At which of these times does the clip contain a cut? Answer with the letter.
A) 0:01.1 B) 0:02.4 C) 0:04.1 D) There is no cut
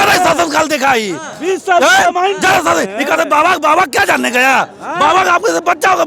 D